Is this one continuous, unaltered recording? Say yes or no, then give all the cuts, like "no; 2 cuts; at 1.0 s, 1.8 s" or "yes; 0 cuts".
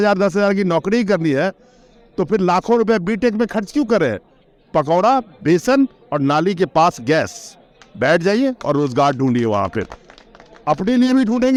yes; 0 cuts